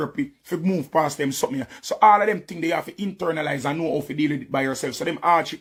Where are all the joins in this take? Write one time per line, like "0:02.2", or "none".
none